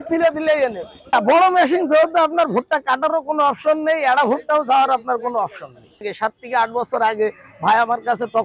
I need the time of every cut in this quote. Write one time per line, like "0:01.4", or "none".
0:01.1
0:06.1